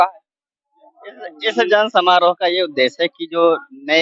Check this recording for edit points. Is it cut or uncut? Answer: uncut